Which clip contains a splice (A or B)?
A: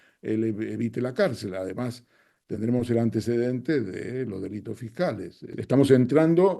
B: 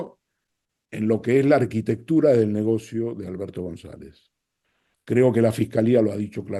A